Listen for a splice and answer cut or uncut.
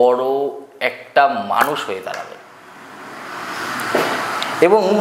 uncut